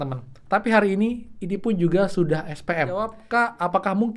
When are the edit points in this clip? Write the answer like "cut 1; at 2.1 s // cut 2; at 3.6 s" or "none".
cut 1; at 3.2 s